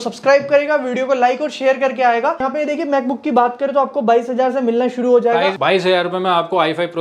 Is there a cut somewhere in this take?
yes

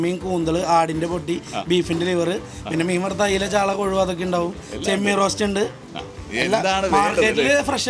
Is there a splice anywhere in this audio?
no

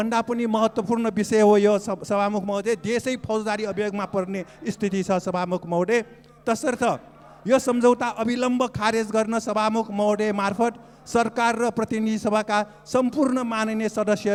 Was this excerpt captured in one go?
yes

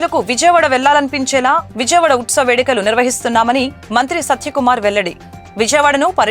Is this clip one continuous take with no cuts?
yes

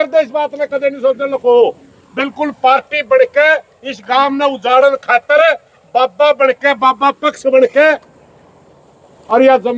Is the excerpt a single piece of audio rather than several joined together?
yes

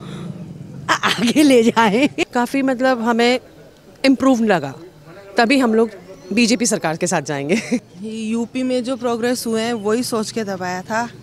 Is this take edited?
yes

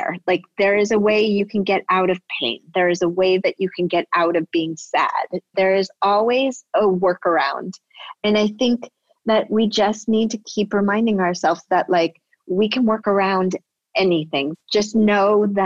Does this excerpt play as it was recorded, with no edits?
no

